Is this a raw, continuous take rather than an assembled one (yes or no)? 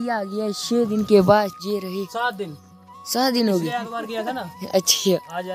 yes